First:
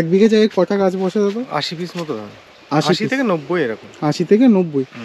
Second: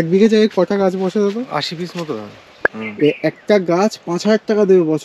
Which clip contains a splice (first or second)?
second